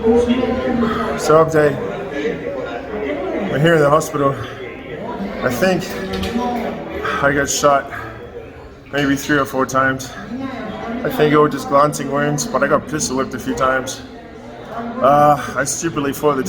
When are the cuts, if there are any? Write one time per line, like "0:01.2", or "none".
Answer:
0:11.0